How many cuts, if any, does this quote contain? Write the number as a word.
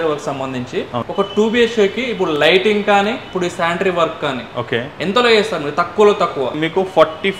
two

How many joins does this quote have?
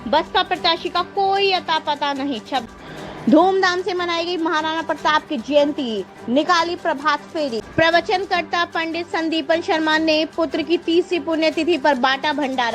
two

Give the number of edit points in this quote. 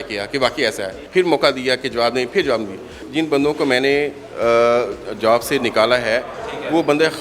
two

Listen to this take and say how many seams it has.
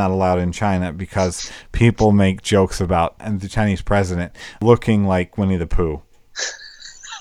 two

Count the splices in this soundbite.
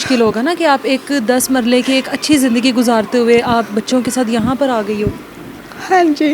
zero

